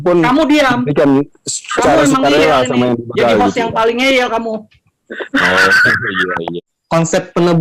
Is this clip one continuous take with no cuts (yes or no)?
no